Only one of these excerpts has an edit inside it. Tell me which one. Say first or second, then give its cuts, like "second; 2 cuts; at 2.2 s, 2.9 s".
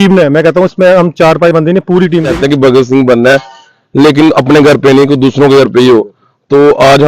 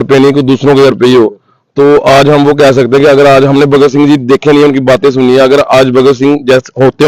first; 1 cut; at 2.3 s